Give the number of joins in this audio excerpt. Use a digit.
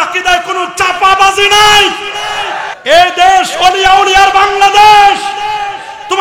1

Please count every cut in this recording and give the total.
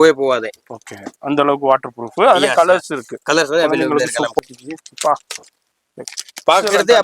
1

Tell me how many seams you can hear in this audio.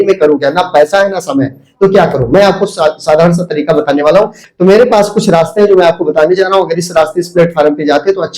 1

